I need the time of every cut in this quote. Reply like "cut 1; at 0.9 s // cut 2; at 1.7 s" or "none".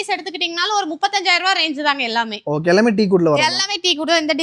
none